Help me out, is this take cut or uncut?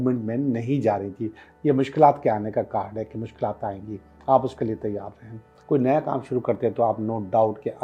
cut